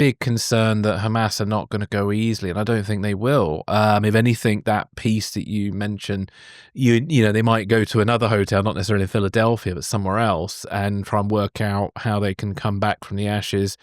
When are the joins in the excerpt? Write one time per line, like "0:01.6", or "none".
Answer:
none